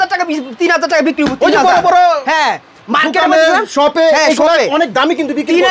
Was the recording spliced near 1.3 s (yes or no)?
no